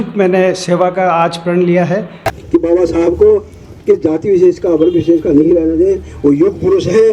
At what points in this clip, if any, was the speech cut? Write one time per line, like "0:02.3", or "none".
0:02.3